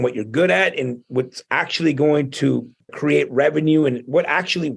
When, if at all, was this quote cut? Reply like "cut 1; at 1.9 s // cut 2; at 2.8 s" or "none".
cut 1; at 2.7 s